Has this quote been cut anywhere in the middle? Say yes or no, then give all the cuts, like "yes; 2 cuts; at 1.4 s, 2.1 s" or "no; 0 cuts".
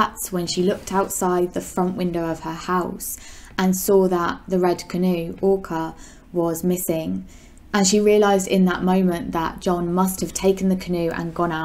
no; 0 cuts